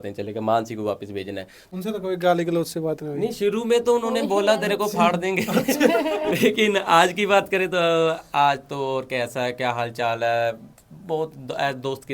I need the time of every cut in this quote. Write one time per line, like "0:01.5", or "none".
0:01.5